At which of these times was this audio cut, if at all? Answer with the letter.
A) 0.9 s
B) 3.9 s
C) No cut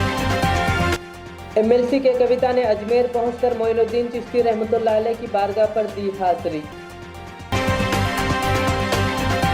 A